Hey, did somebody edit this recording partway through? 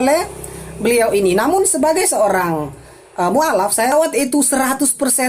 yes; 1 cut; at 3.9 s

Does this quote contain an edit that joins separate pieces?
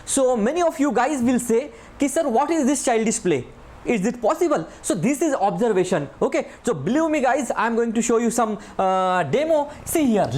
no; 0 cuts

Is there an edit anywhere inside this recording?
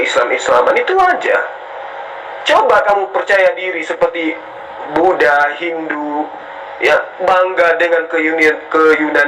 no; 0 cuts

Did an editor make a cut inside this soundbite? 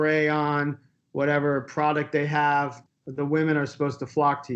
yes; 1 cut; at 2.8 s

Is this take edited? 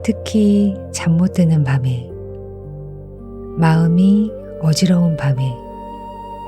yes; 2 cuts; at 2.0 s, 3.6 s

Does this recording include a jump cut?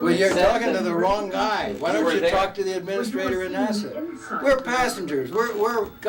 no; 0 cuts

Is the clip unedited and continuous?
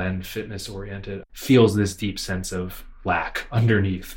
no; 1 cut; at 1.2 s

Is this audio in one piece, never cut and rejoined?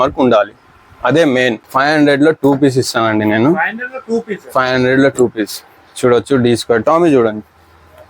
no; 1 cut; at 1.6 s

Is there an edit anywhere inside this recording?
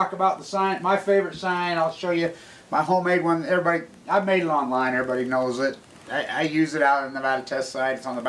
yes; 1 cut; at 3.7 s

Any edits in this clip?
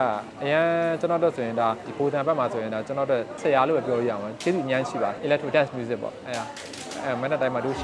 yes; 1 cut; at 5.2 s

